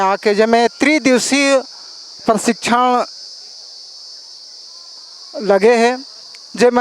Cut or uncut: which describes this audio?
uncut